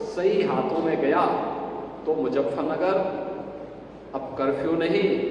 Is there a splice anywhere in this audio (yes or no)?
no